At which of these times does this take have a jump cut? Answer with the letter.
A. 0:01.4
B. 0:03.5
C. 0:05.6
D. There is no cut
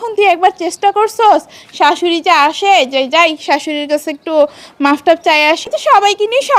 C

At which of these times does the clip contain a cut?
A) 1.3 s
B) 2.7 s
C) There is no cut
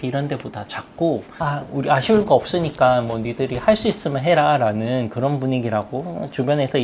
A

